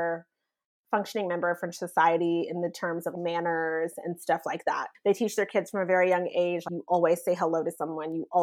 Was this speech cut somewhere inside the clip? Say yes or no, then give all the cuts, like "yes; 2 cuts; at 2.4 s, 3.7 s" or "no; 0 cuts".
no; 0 cuts